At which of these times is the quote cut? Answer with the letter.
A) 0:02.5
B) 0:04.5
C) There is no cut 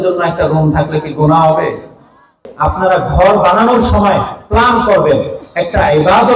A